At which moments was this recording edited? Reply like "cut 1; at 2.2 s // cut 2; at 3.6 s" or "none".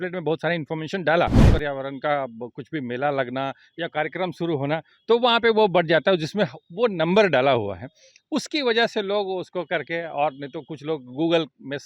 cut 1; at 1.5 s

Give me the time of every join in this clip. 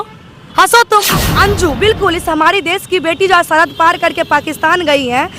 cut 1; at 1.3 s

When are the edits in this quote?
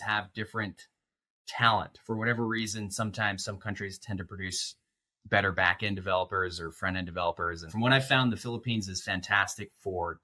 cut 1; at 7.7 s

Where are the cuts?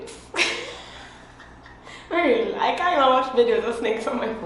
none

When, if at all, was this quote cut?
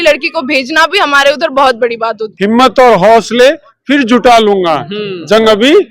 cut 1; at 2.2 s

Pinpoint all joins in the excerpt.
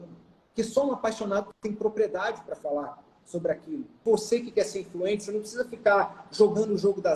cut 1; at 4.0 s

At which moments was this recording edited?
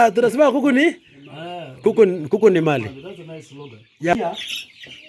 cut 1; at 4.1 s

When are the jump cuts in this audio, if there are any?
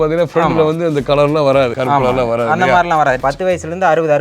cut 1; at 1.8 s // cut 2; at 3.2 s

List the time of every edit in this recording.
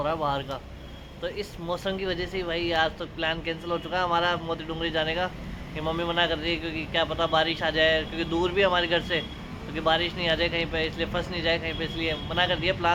none

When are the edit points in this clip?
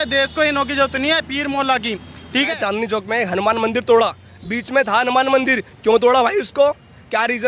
cut 1; at 2.6 s

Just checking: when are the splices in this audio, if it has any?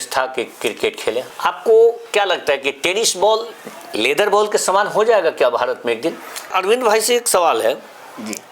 cut 1; at 1.3 s // cut 2; at 6.5 s

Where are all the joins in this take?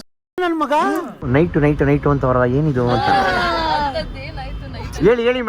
cut 1; at 1.1 s

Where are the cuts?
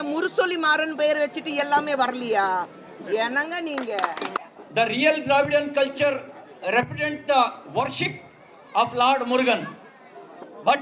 cut 1; at 4.4 s

